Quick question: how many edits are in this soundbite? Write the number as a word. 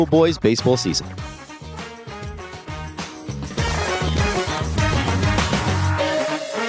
one